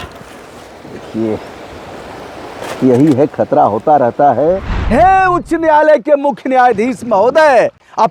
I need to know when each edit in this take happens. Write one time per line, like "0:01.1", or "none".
0:04.7